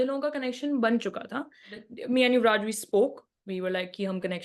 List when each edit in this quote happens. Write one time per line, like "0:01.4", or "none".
0:01.8

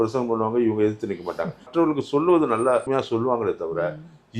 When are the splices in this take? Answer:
0:01.7
0:02.9

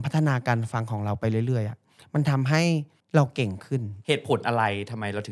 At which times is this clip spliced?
0:03.9

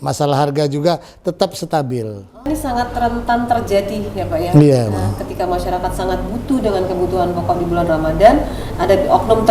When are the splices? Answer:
0:02.3

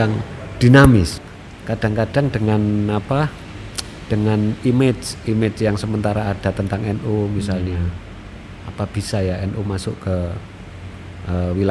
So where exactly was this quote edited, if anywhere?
0:01.2

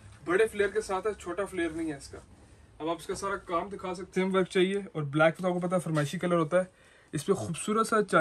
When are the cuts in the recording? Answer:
0:04.1

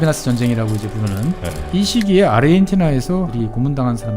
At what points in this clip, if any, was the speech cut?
0:01.5
0:03.3

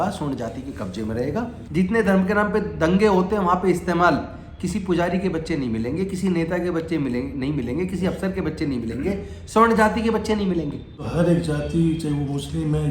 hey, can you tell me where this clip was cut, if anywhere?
0:01.6
0:11.0

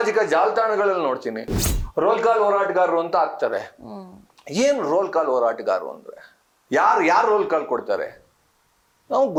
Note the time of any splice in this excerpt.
none

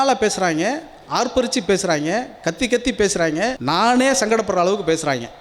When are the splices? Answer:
0:03.6

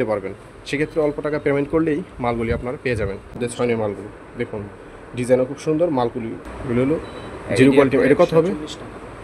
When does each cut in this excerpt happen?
0:03.4
0:06.4

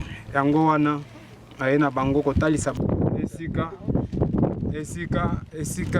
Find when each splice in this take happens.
0:02.7

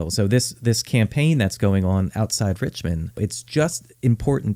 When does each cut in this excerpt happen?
0:03.3

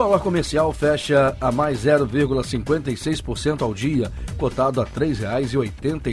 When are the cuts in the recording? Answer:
none

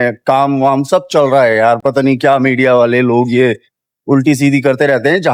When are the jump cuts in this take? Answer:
none

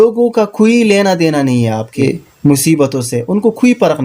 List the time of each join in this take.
0:02.0

